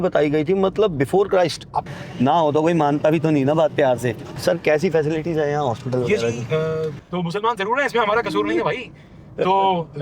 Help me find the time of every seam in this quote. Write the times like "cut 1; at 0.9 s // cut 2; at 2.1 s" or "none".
cut 1; at 1.8 s // cut 2; at 4.3 s // cut 3; at 7.0 s